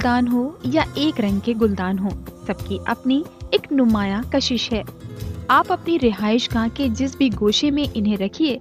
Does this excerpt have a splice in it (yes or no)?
yes